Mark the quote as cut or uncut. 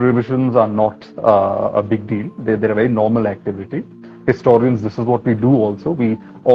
uncut